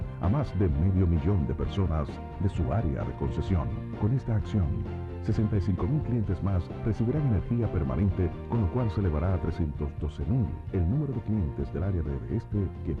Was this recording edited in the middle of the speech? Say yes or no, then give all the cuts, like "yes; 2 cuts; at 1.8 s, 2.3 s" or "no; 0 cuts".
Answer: no; 0 cuts